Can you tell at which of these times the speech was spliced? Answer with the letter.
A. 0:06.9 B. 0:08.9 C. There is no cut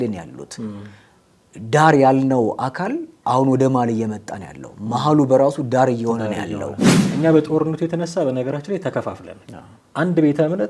A